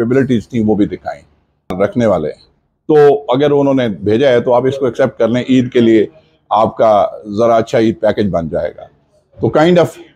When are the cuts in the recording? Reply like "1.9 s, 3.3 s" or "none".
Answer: 1.7 s

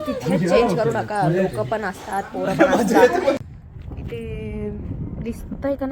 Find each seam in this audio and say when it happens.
3.4 s

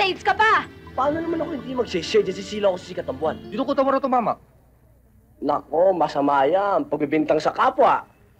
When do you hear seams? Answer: 3.4 s

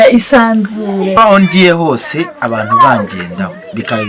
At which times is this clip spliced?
1.2 s

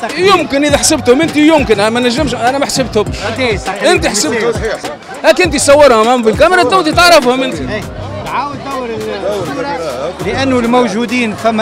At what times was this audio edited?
4.8 s

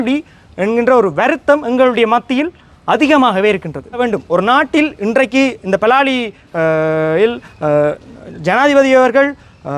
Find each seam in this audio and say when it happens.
4.0 s

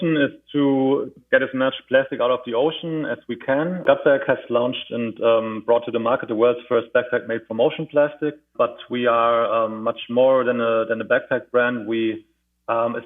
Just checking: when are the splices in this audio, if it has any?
1.2 s, 3.8 s, 8.5 s

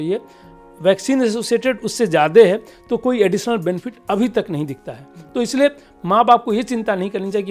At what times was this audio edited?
none

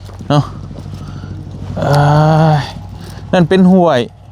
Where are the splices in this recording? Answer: none

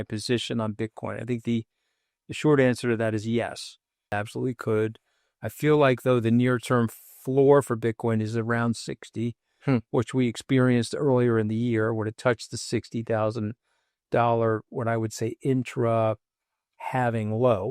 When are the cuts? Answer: 4.1 s

